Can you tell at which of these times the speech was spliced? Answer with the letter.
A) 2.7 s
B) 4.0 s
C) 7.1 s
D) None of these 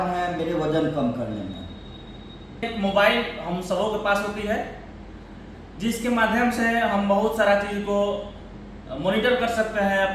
A